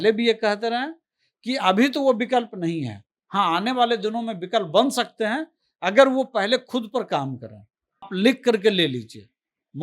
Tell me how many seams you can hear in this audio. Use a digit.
1